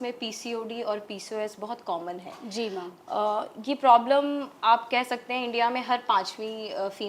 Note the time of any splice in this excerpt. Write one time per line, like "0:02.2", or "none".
none

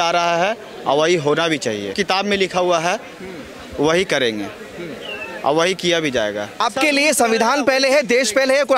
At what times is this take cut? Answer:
0:01.9
0:06.6

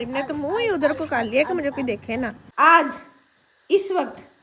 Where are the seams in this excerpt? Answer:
0:02.4

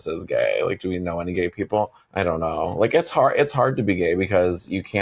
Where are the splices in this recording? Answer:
none

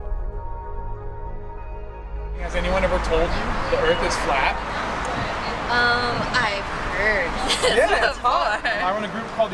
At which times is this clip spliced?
0:02.2

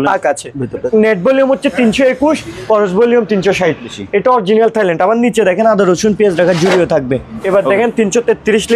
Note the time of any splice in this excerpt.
0:00.9
0:04.0
0:07.4

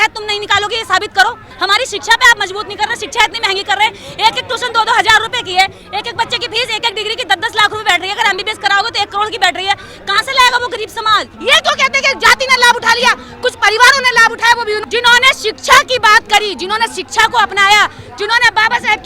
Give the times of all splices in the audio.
0:01.5
0:11.3
0:14.8

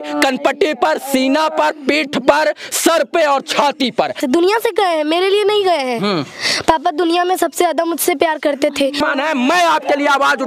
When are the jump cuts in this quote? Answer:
0:04.2
0:09.0

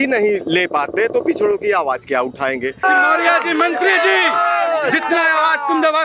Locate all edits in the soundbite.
0:02.8

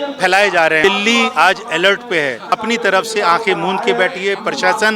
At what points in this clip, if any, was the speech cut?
0:00.8
0:02.5

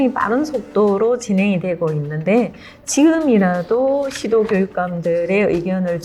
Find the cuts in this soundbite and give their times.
none

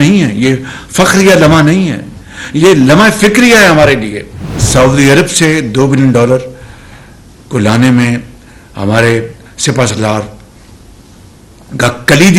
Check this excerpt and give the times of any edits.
0:04.6

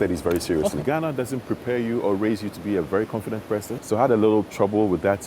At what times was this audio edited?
0:00.8
0:03.8

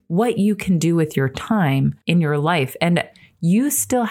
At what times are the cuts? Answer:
0:02.0
0:03.1

